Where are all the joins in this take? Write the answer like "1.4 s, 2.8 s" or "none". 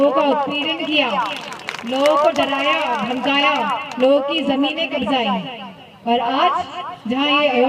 none